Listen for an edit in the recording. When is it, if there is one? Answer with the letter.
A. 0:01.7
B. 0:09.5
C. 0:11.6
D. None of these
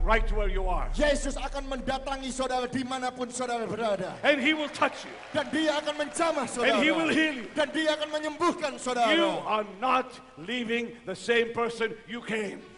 C